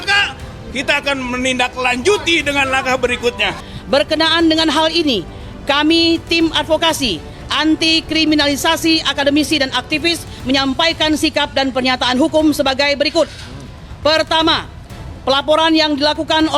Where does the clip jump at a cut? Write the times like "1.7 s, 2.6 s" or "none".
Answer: 3.5 s